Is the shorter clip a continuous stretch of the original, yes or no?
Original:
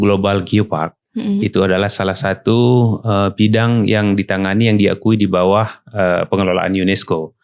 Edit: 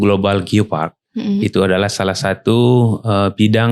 yes